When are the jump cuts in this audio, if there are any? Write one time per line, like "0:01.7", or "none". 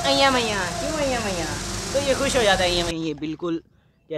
0:02.9